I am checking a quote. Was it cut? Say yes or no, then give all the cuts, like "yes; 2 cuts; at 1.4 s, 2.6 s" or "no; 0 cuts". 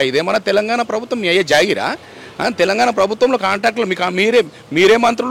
no; 0 cuts